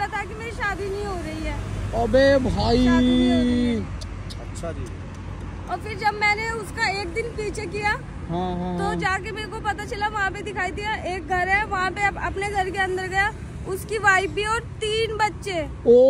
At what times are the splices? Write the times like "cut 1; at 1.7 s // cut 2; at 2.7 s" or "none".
none